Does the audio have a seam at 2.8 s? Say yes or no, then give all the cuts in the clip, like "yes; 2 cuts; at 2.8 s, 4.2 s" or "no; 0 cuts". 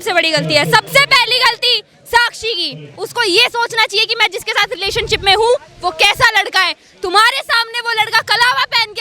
yes; 1 cut; at 2.8 s